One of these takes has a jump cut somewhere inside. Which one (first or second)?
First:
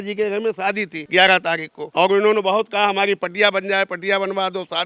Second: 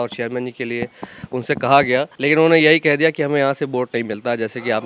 first